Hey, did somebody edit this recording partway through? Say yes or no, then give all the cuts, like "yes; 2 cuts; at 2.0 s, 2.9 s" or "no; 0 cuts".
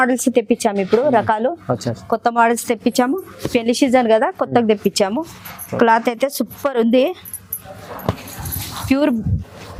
no; 0 cuts